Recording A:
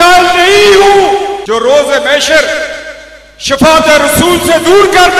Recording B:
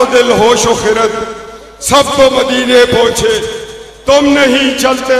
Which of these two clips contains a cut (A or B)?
A